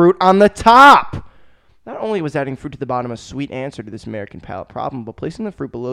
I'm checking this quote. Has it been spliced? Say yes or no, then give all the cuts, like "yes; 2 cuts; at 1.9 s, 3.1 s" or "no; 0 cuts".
no; 0 cuts